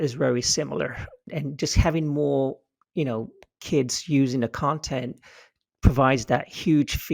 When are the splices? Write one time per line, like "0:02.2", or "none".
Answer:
0:01.3